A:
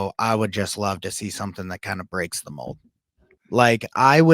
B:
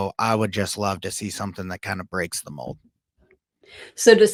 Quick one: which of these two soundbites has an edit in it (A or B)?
A